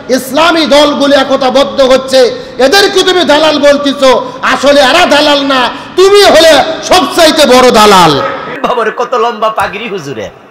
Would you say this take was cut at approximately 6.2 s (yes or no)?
no